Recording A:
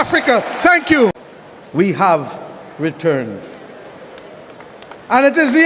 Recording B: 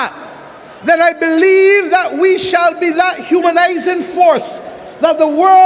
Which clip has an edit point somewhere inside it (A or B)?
A